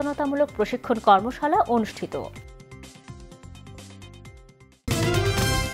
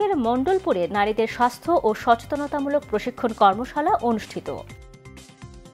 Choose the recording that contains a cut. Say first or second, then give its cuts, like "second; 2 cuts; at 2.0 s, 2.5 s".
first; 1 cut; at 4.8 s